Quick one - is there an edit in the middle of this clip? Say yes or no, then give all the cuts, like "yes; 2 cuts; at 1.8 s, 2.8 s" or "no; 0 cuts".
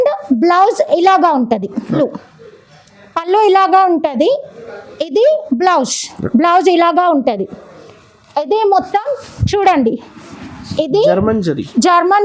yes; 1 cut; at 1.9 s